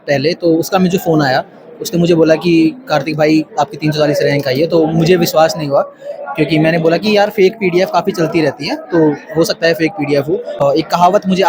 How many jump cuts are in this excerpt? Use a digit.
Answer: 1